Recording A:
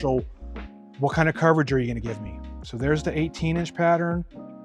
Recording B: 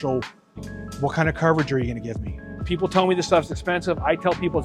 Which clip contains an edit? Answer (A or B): B